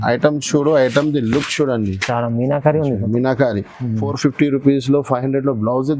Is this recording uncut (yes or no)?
no